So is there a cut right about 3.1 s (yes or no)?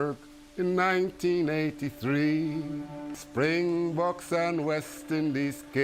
yes